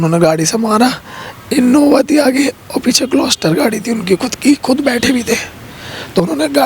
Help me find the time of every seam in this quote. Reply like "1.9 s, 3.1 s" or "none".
none